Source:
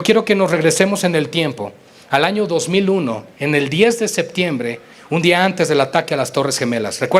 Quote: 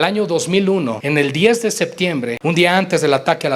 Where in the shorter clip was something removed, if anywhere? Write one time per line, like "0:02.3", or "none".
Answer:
0:01.0
0:02.3